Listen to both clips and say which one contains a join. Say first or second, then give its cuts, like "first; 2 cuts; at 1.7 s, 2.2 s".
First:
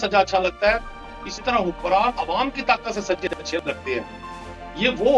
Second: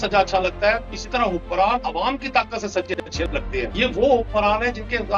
second; 2 cuts; at 0.9 s, 3.7 s